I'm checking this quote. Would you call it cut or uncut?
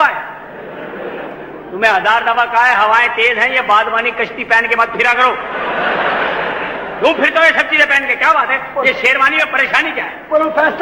uncut